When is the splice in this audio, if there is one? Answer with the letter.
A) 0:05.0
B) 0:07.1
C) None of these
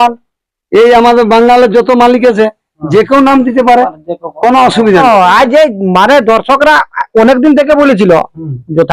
A